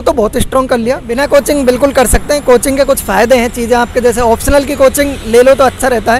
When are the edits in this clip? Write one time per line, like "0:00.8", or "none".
0:01.1